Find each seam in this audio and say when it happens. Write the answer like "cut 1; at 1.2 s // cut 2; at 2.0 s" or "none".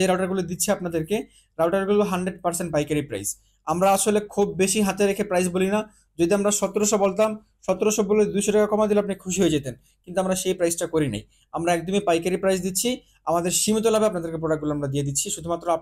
none